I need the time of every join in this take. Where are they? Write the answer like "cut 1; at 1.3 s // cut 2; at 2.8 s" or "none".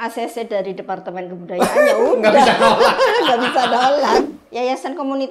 cut 1; at 4.2 s